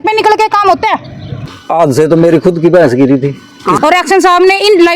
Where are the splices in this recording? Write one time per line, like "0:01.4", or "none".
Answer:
0:01.5
0:03.8